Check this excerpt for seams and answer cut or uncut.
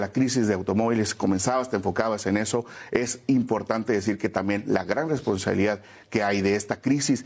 uncut